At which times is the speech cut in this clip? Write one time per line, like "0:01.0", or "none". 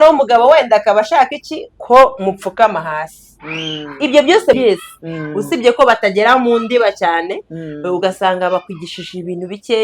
0:04.6